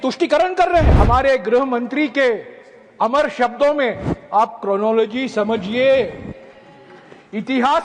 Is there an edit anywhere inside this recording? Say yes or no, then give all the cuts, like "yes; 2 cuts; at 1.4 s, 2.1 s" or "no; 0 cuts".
yes; 1 cut; at 0.9 s